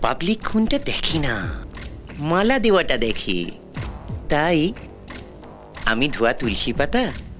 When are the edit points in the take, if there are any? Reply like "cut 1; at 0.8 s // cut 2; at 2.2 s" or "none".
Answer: none